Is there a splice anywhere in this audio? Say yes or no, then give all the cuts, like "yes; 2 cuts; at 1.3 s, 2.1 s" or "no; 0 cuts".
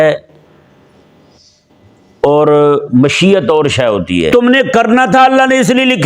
yes; 1 cut; at 4.3 s